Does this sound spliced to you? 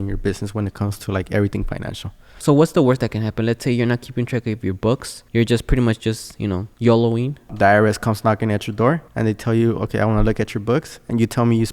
yes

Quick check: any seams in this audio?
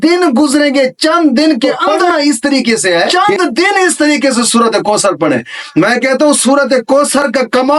yes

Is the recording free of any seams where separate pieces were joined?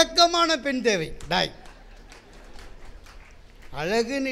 yes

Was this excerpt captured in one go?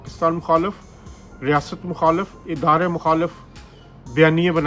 yes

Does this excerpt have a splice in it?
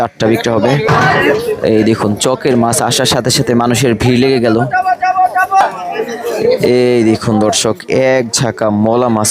yes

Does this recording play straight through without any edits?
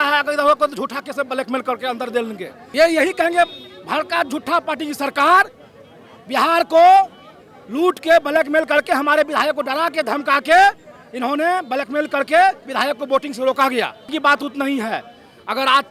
no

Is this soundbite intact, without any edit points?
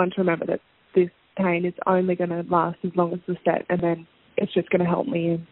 yes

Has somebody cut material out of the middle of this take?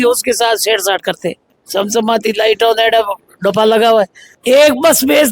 yes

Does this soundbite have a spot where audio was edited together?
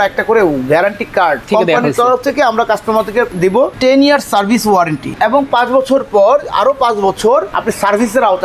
yes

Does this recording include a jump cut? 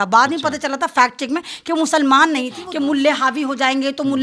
yes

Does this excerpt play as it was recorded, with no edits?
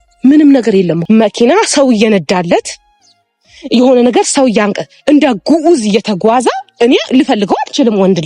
no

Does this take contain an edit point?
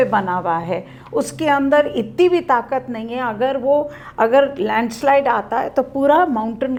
no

